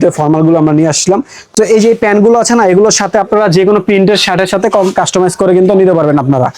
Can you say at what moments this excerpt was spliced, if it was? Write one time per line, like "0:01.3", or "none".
0:01.4